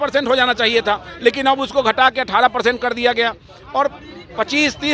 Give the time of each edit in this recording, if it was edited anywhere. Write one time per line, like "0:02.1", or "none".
none